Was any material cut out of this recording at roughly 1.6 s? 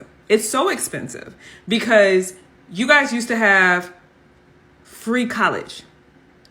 no; 0 cuts

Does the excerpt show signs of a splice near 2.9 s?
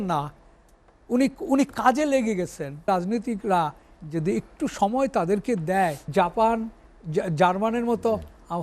yes; 2 cuts; at 2.9 s, 6.0 s

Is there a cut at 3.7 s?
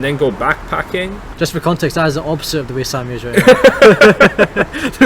no; 1 cut; at 1.2 s

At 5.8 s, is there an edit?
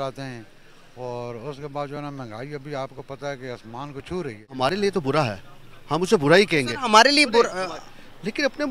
no; 1 cut; at 4.5 s

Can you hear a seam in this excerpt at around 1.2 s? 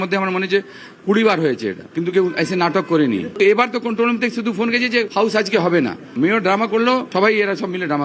no; 2 cuts; at 5.1 s, 7.1 s

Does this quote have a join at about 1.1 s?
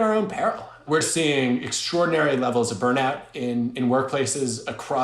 yes; 1 cut; at 1.1 s

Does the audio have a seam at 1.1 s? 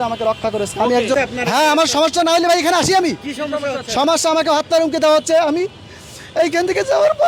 no; 0 cuts

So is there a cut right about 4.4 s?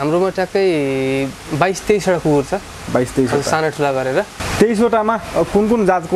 yes; 1 cut; at 4.4 s

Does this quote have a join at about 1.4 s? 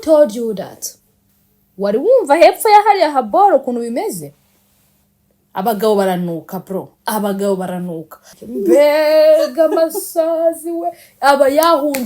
no; 1 cut; at 8.3 s

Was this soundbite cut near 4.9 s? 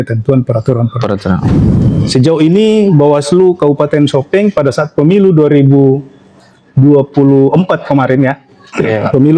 no; 1 cut; at 1.6 s

